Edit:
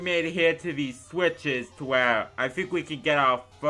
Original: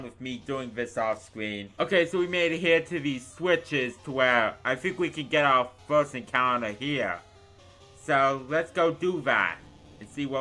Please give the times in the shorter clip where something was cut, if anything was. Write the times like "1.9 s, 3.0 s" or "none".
none